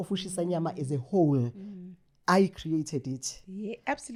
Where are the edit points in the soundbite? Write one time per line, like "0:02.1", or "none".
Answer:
none